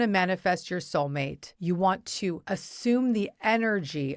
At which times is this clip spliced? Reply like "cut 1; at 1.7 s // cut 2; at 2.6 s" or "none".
cut 1; at 1.4 s // cut 2; at 2.4 s